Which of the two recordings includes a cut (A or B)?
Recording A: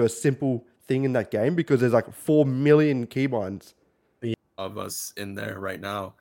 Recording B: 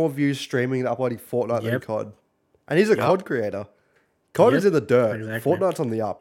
A